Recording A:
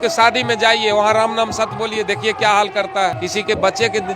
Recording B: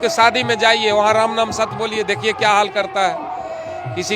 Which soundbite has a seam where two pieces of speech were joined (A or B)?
A